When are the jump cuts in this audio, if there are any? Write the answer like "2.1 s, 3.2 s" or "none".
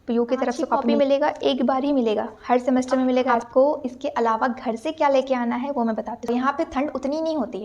0.9 s, 3.4 s, 6.3 s